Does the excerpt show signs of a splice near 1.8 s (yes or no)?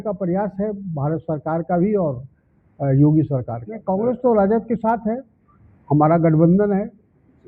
no